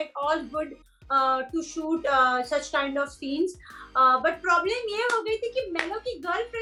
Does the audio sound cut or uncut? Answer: uncut